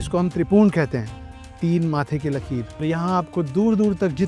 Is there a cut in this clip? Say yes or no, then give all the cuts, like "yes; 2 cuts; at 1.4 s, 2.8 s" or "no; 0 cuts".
yes; 1 cut; at 2.8 s